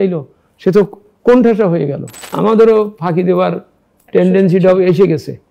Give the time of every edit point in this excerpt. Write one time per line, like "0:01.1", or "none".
0:02.2